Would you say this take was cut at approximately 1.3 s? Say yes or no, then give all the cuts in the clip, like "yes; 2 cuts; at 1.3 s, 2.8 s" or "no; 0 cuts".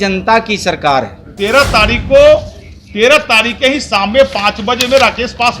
yes; 1 cut; at 1.3 s